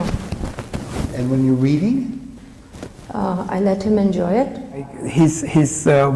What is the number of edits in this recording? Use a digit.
1